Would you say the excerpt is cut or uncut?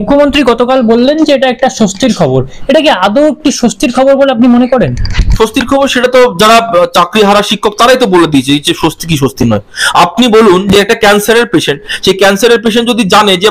uncut